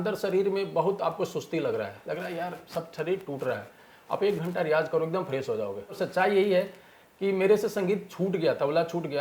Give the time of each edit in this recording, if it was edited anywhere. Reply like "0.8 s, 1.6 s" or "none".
6.0 s